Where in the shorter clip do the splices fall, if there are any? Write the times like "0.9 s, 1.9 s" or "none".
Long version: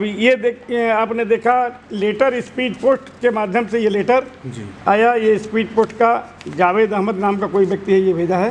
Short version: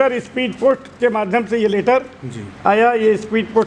none